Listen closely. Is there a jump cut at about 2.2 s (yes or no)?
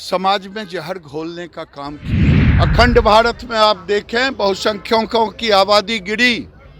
yes